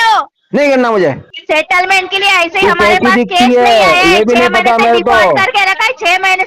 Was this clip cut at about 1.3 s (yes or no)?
yes